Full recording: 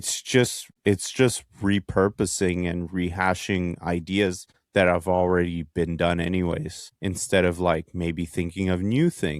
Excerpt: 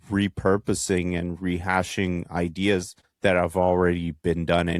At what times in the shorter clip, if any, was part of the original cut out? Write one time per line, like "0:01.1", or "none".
none